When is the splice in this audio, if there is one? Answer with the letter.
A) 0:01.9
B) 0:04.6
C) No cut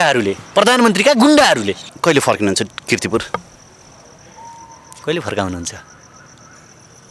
A